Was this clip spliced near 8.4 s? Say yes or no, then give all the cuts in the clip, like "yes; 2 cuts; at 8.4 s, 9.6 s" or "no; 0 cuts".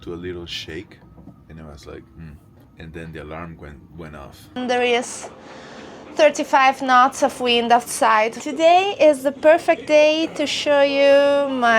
yes; 2 cuts; at 4.6 s, 8.4 s